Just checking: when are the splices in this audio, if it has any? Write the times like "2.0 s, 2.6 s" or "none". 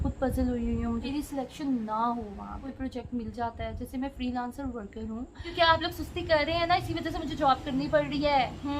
1.1 s, 2.7 s, 5.5 s